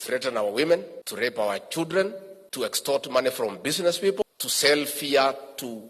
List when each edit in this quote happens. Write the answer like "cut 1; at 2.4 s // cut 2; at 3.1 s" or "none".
cut 1; at 1.0 s // cut 2; at 2.8 s // cut 3; at 4.2 s